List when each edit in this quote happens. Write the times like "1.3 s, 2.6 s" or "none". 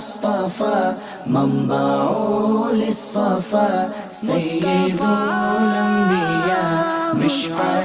none